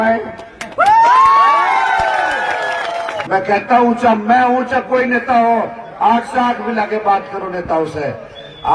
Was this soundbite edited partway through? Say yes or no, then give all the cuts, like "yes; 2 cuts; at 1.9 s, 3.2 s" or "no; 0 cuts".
yes; 1 cut; at 3.2 s